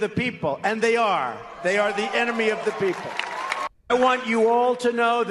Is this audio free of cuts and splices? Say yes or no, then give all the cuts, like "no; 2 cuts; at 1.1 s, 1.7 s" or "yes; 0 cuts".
no; 1 cut; at 3.8 s